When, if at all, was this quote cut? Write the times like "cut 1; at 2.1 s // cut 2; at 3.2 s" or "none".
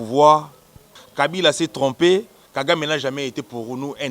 cut 1; at 1.0 s